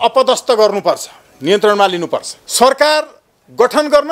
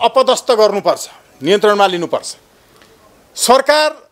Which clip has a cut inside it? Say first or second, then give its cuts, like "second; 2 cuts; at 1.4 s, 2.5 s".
first; 1 cut; at 2.4 s